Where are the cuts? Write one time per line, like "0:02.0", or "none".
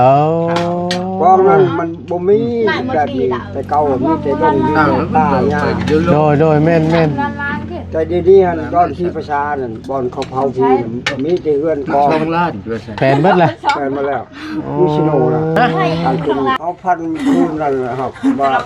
0:16.6